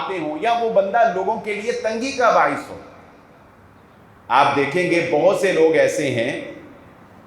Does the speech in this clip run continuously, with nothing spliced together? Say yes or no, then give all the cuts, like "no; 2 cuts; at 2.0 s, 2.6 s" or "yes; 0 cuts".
yes; 0 cuts